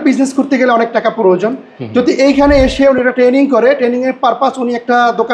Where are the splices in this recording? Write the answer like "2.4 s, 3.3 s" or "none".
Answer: none